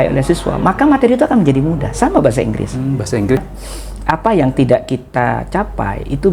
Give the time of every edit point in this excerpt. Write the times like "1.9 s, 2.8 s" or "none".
3.4 s

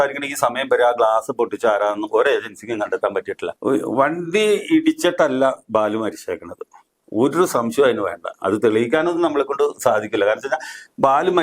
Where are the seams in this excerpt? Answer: 3.4 s

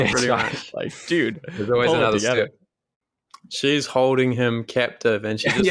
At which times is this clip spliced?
3.1 s

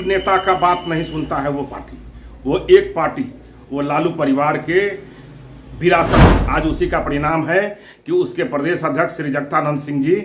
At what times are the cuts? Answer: 6.4 s

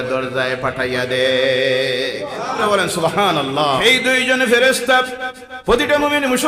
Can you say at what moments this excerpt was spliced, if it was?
2.6 s, 3.8 s

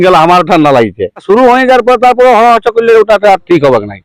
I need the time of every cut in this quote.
1.2 s

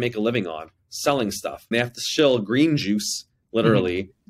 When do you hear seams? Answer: 1.7 s

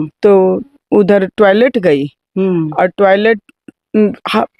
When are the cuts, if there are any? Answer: none

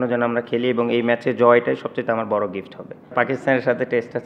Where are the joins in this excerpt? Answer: 3.1 s

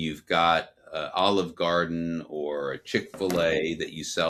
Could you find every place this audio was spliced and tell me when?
none

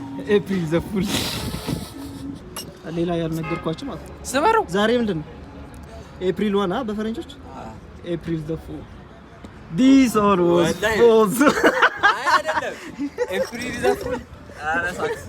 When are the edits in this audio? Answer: 2.4 s

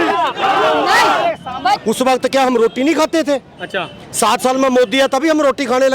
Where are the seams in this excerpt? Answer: 1.8 s

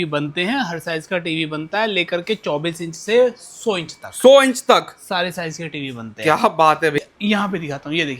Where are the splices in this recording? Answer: 7.0 s

